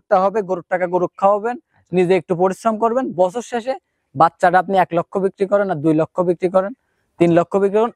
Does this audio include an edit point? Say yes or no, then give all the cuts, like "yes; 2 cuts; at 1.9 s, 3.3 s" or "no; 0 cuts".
no; 0 cuts